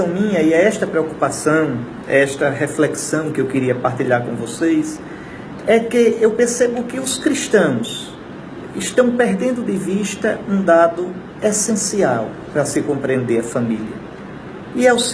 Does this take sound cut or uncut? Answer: cut